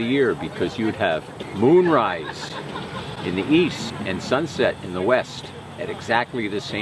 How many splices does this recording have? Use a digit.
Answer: 2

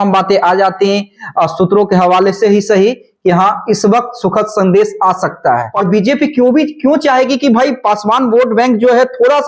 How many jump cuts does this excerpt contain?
1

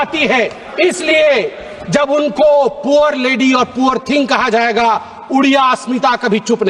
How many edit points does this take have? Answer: 0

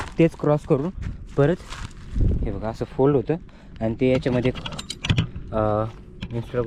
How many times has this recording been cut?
0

